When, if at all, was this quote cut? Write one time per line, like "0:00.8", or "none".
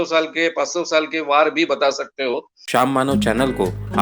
0:02.5